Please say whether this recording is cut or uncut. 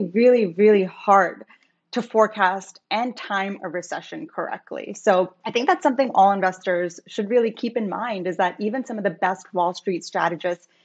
cut